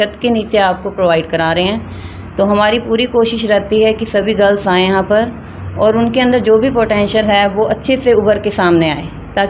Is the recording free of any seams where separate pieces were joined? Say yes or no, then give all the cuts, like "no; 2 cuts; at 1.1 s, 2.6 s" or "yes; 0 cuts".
yes; 0 cuts